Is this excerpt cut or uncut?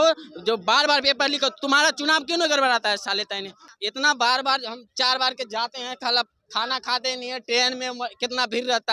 uncut